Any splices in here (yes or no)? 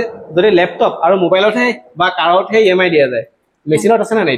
no